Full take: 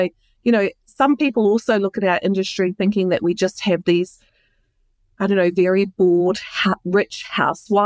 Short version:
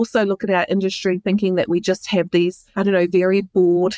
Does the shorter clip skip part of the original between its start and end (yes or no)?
yes